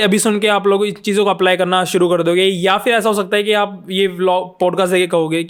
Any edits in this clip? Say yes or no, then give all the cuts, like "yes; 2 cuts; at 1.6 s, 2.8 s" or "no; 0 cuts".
no; 0 cuts